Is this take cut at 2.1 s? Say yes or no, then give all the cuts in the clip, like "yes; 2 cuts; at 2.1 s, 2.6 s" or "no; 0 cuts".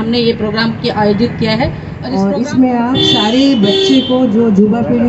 yes; 1 cut; at 2.1 s